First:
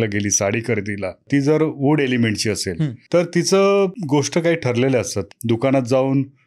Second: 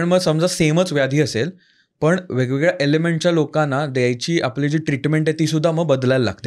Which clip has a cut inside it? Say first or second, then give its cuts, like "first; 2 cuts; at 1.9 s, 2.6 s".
first; 4 cuts; at 1.2 s, 2.9 s, 4.0 s, 5.3 s